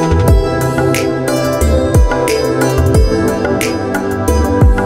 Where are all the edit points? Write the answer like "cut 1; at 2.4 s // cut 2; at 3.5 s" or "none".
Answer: none